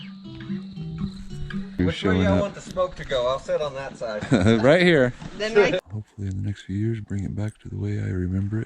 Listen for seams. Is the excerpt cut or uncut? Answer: cut